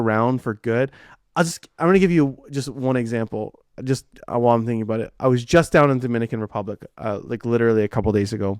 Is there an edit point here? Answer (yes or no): no